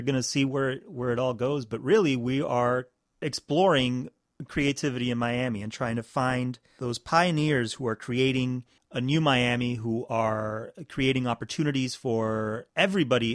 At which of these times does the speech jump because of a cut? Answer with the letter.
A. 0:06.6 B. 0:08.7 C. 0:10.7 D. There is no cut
D